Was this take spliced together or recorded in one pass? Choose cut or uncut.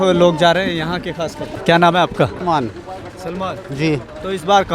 cut